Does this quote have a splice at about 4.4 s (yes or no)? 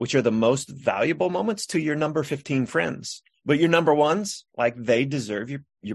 no